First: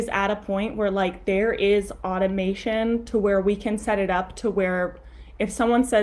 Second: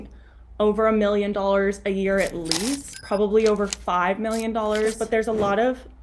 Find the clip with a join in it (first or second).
second